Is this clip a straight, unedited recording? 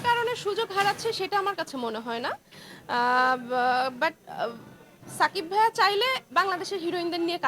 yes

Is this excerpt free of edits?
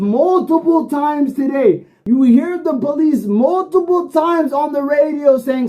yes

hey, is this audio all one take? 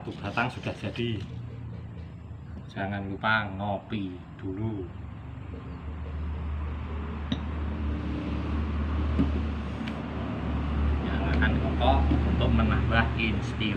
yes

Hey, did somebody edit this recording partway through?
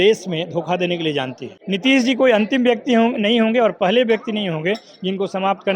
yes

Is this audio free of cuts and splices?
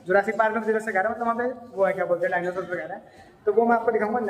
yes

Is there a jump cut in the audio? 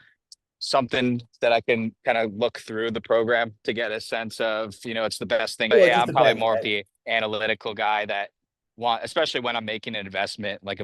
yes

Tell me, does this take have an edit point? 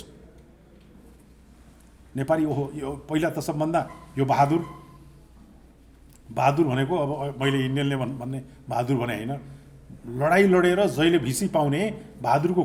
no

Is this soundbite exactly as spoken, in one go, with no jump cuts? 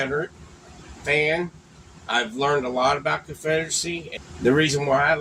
no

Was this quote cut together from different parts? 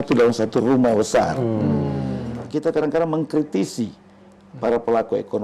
yes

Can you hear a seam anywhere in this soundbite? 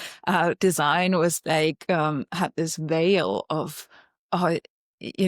no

